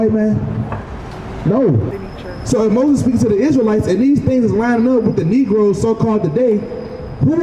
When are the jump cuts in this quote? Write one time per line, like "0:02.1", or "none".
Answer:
0:01.9